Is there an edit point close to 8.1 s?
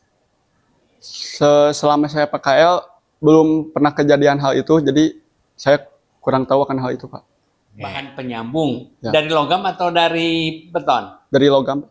yes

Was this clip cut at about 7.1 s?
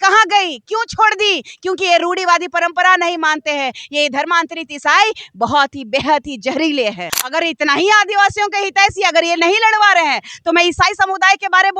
yes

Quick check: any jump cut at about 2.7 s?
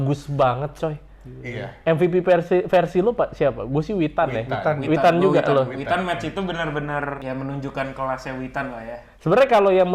no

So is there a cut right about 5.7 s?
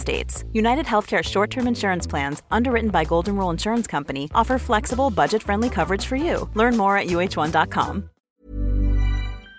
no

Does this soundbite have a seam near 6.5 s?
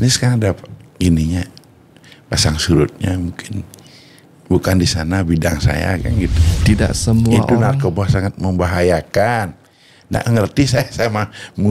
yes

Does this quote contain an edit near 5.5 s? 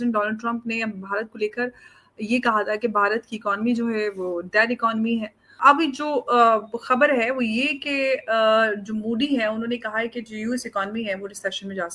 yes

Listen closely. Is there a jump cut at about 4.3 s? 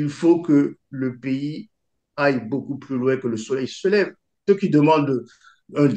yes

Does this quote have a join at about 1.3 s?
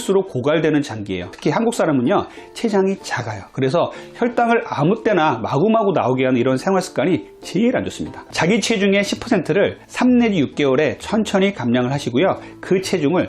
yes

